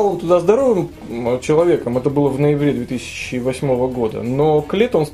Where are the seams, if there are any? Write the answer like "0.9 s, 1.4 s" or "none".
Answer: none